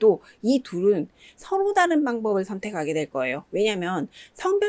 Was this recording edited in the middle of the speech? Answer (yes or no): no